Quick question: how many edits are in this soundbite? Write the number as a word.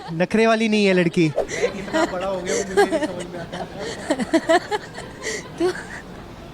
one